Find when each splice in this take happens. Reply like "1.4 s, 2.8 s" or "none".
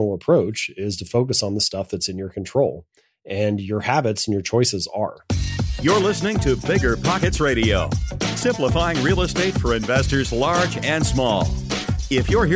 5.2 s